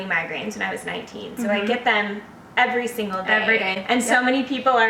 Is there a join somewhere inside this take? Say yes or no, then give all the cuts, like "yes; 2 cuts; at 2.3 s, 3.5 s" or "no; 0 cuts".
no; 0 cuts